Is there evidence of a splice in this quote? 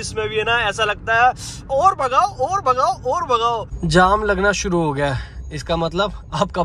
yes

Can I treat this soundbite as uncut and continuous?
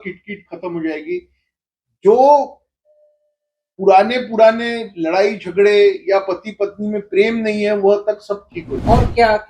no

